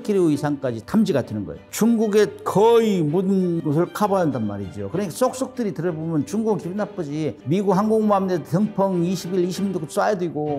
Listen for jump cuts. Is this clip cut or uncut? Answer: cut